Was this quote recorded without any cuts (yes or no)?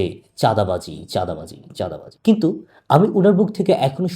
no